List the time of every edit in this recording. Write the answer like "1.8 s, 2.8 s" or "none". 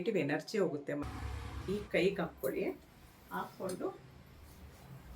1.0 s